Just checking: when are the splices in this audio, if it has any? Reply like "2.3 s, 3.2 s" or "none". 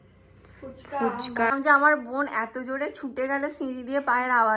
1.5 s